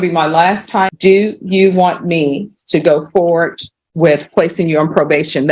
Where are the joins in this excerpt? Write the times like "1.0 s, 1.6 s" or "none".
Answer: 0.9 s